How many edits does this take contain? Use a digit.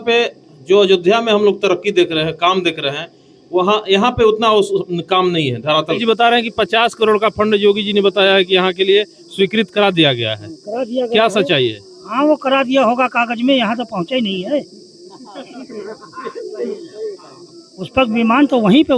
2